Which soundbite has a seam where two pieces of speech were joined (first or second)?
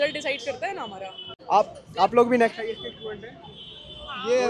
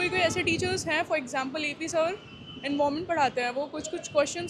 first